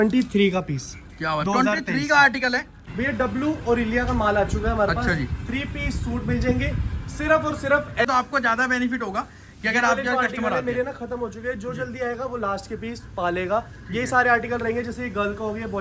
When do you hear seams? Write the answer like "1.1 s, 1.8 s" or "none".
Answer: 2.7 s, 8.0 s